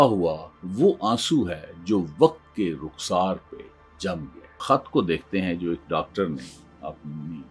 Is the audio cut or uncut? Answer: cut